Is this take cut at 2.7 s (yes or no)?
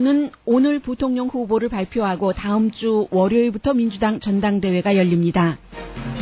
no